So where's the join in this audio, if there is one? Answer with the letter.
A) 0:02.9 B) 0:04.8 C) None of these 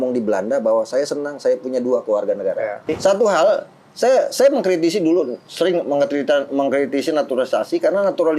A